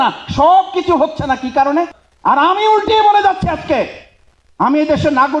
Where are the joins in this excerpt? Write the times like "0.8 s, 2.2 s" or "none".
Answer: 2.0 s